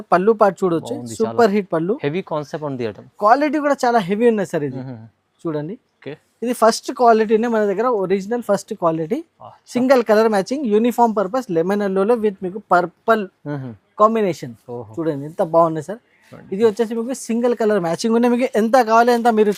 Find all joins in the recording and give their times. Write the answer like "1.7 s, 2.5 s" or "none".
none